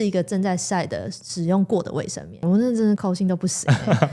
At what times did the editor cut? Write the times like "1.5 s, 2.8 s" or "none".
2.4 s, 3.0 s